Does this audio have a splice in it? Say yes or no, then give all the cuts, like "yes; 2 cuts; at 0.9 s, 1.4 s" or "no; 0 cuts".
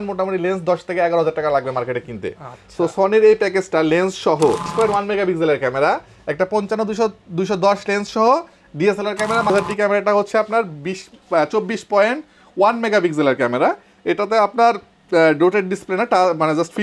yes; 2 cuts; at 4.7 s, 9.5 s